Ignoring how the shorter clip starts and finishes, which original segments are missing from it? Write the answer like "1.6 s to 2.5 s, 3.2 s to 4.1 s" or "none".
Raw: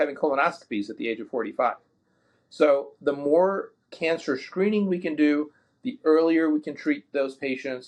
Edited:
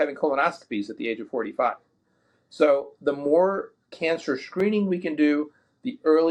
none